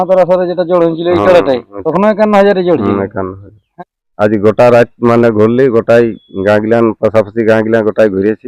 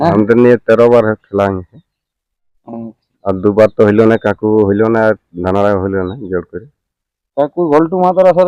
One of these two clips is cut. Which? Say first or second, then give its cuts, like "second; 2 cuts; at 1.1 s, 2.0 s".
first; 2 cuts; at 1.7 s, 3.6 s